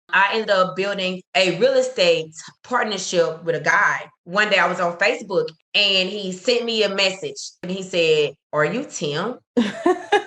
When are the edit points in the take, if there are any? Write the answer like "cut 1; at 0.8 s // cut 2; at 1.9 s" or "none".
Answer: cut 1; at 9.4 s